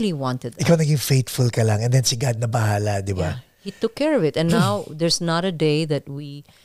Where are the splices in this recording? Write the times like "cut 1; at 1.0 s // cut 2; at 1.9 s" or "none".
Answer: none